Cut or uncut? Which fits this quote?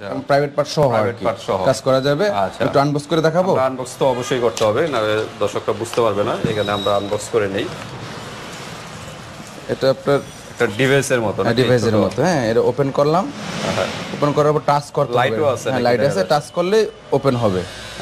uncut